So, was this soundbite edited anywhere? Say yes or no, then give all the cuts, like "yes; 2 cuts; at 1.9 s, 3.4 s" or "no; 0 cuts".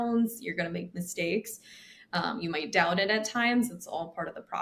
no; 0 cuts